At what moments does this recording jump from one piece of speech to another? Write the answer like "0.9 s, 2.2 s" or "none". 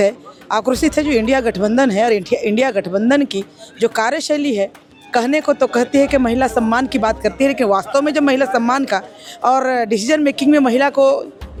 none